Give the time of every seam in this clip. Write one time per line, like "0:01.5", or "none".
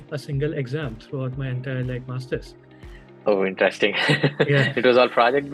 none